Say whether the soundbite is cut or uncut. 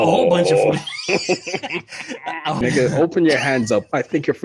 cut